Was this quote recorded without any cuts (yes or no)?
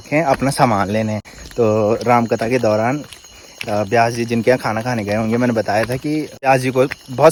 yes